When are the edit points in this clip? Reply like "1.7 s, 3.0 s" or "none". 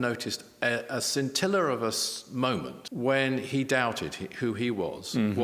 2.8 s